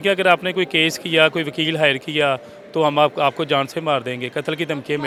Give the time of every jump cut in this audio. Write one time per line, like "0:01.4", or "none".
none